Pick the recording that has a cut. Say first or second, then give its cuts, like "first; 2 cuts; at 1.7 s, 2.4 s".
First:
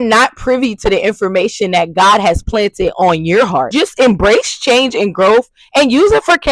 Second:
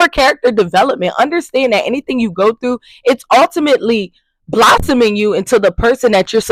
first; 1 cut; at 3.7 s